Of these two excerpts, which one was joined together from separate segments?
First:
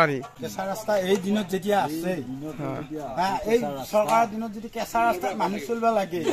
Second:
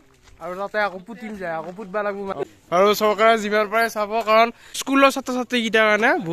second; 1 cut; at 2.1 s

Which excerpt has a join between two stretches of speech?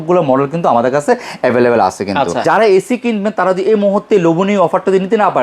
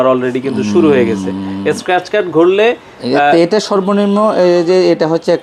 first; 1 cut; at 2.4 s

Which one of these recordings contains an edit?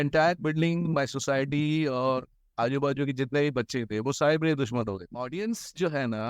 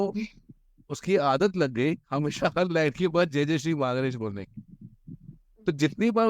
first; 1 cut; at 5.2 s

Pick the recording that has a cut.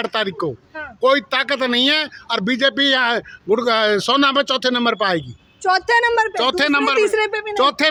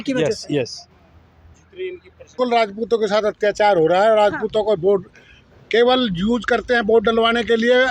second; 1 cut; at 2.3 s

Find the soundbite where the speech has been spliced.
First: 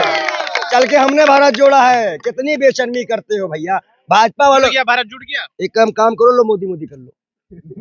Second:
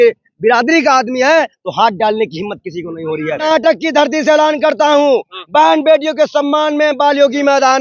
second; 1 cut; at 3.4 s

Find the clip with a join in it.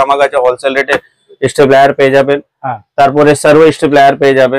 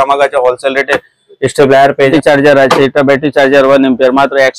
second; 1 cut; at 2.1 s

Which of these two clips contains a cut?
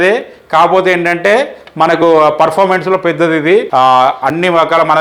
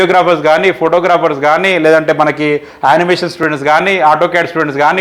first; 1 cut; at 3.7 s

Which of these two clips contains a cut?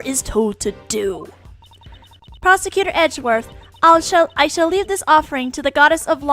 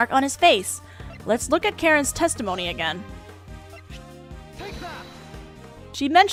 first; 1 cut; at 2.6 s

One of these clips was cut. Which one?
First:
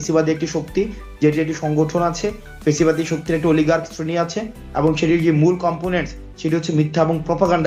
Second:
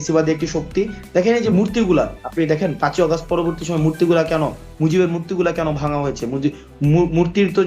second; 1 cut; at 1.0 s

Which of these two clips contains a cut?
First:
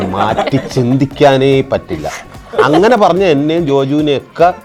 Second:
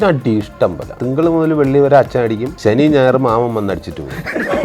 second; 2 cuts; at 1.0 s, 2.5 s

